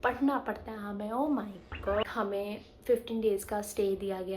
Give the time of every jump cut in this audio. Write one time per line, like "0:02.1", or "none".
0:02.0